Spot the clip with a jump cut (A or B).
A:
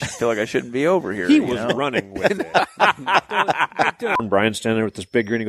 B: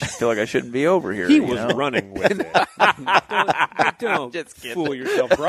A